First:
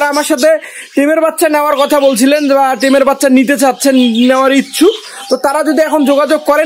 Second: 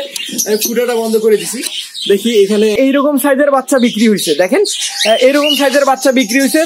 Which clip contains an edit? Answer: second; 1 cut; at 2.7 s

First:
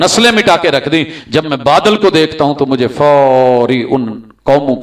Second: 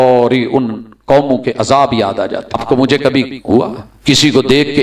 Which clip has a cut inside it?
second; 2 cuts; at 2.6 s, 3.9 s

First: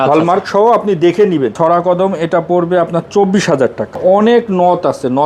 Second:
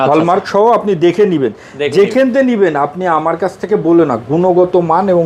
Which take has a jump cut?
first; 2 cuts; at 1.5 s, 4.0 s

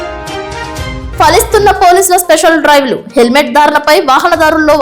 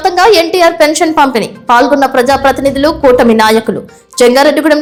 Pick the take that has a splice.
first; 1 cut; at 1.0 s

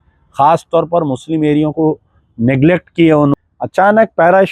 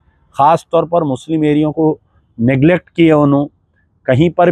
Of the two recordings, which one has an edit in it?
first; 1 cut; at 3.3 s

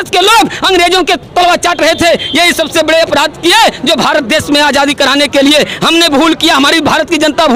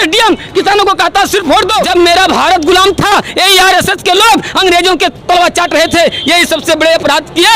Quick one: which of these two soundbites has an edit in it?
second; 1 cut; at 1.8 s

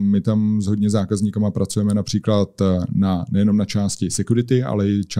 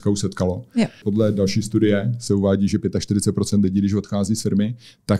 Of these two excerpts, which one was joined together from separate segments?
second; 1 cut; at 1.0 s

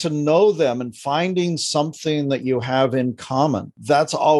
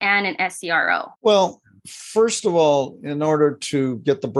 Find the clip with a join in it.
second; 1 cut; at 1.1 s

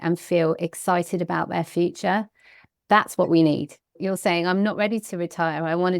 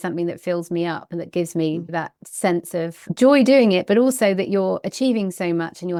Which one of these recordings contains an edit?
first; 1 cut; at 3.9 s

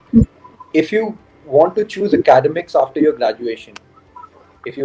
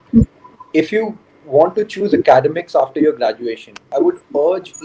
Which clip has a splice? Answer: second; 1 cut; at 3.9 s

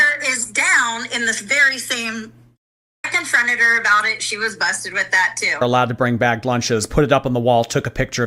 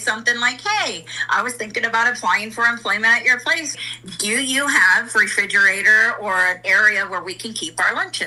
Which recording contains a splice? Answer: first; 2 cuts; at 3.1 s, 5.6 s

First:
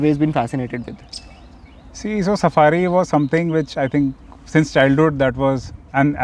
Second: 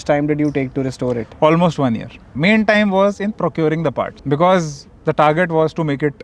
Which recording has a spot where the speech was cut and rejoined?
second; 2 cuts; at 2.2 s, 4.2 s

